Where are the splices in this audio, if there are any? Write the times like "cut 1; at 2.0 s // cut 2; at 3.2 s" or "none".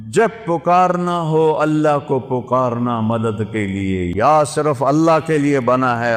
cut 1; at 4.1 s